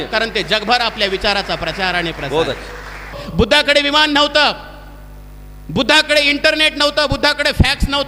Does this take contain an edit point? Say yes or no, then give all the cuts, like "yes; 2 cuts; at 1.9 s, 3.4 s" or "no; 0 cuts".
yes; 1 cut; at 3.2 s